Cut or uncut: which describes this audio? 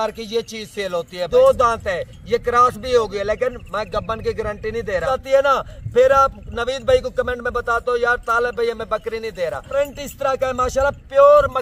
cut